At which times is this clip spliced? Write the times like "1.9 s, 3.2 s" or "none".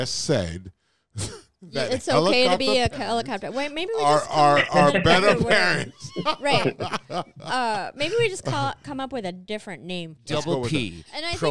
10.1 s